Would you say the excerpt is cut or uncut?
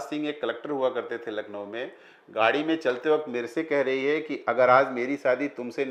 uncut